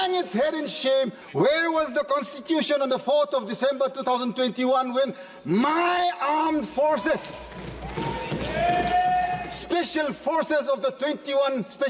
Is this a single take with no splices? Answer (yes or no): no